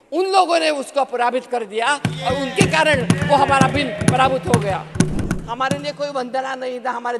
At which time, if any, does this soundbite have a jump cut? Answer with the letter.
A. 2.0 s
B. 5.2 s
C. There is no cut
B